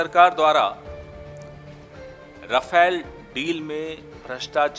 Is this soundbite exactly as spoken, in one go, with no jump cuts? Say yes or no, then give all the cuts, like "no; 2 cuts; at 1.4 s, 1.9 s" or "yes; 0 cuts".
no; 2 cuts; at 0.8 s, 2.1 s